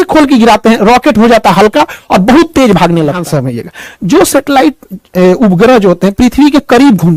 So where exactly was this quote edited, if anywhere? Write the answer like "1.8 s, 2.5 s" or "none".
3.2 s